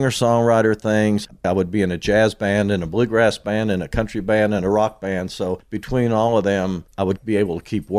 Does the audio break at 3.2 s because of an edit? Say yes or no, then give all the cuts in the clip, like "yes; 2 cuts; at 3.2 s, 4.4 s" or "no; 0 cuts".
no; 3 cuts; at 1.4 s, 5.7 s, 7.2 s